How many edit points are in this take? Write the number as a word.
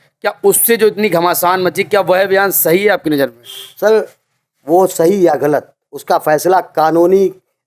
zero